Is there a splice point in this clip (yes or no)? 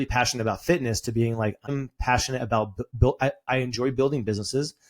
yes